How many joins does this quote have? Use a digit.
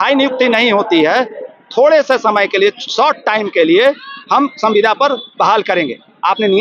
0